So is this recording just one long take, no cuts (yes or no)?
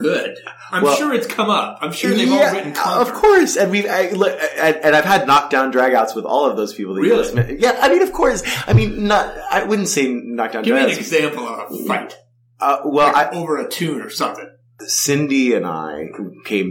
yes